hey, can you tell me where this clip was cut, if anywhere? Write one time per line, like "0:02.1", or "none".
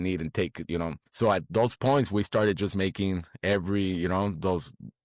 0:01.0